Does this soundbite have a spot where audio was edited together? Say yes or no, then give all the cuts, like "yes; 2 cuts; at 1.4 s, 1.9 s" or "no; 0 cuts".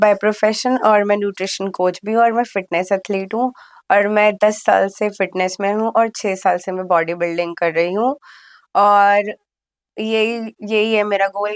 no; 0 cuts